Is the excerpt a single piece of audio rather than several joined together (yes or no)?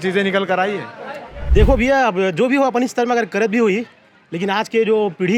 no